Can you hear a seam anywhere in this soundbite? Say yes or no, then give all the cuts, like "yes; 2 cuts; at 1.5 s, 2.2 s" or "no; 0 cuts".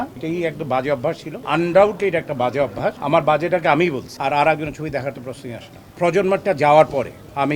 yes; 3 cuts; at 1.4 s, 4.1 s, 5.9 s